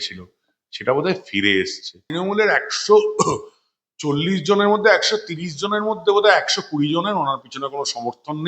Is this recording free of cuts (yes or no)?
no